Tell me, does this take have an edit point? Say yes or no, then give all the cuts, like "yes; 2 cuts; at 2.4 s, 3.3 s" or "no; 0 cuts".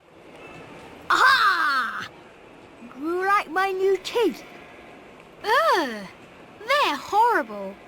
yes; 1 cut; at 1.1 s